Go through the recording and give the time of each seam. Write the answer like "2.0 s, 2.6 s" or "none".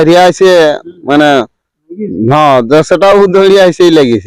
none